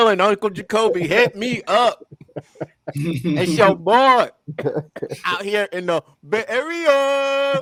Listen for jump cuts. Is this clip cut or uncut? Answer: uncut